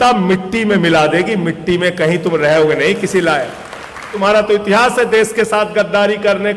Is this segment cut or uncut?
cut